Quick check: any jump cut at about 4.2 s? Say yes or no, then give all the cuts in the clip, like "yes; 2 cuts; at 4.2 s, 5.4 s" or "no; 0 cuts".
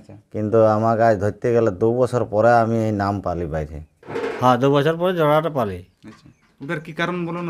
yes; 1 cut; at 4.2 s